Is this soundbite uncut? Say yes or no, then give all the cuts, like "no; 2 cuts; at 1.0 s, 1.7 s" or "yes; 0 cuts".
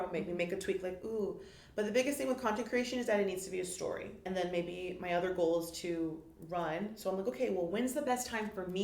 no; 1 cut; at 4.1 s